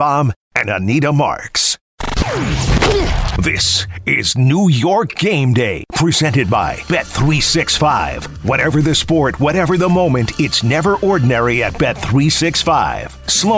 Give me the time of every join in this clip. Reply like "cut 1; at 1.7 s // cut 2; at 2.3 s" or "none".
cut 1; at 1.8 s